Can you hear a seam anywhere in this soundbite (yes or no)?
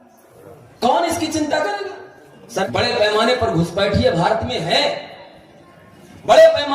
yes